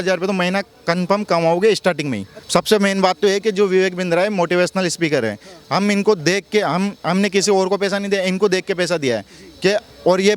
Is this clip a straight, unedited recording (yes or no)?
no